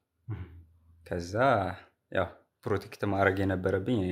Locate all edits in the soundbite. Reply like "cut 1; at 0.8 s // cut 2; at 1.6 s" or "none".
none